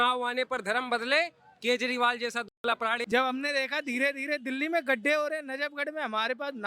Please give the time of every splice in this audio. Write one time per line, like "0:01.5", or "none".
0:02.6